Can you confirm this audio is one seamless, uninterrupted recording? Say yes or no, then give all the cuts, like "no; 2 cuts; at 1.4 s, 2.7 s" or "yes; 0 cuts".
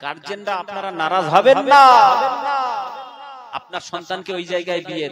yes; 0 cuts